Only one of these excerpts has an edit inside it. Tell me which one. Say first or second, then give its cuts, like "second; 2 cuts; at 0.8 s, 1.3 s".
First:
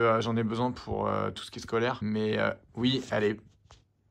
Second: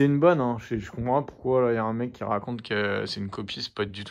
first; 1 cut; at 2.0 s